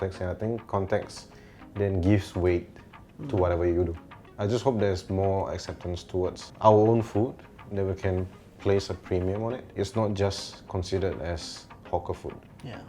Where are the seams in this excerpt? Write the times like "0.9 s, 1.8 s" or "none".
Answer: 4.2 s, 6.5 s, 9.7 s